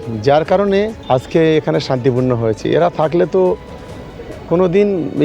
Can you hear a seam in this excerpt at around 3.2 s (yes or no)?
no